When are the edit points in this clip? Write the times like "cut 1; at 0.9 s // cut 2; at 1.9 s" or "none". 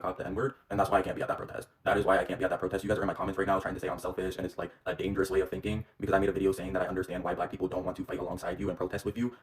none

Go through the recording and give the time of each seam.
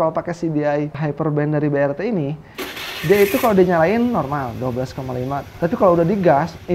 cut 1; at 1.0 s

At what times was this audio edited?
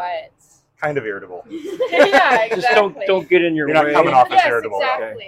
none

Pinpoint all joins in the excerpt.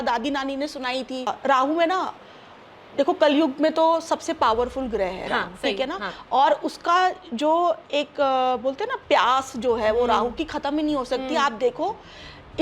cut 1; at 1.3 s

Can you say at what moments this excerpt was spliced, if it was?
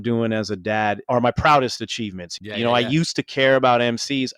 cut 1; at 1.0 s // cut 2; at 2.4 s

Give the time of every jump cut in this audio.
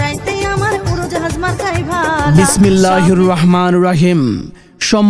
cut 1; at 2.2 s

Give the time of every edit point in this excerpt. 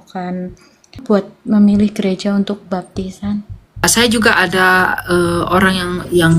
cut 1; at 1.0 s // cut 2; at 3.8 s

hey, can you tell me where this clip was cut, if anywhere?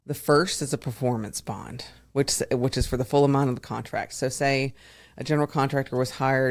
none

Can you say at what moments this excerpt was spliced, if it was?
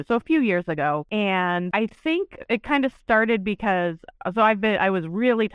cut 1; at 1.1 s // cut 2; at 1.7 s

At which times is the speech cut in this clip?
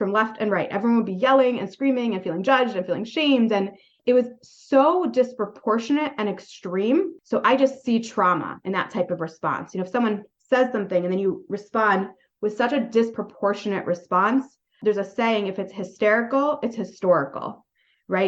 cut 1; at 3.9 s // cut 2; at 7.1 s

